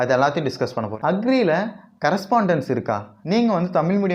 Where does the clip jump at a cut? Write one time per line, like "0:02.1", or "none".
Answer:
0:00.9
0:03.1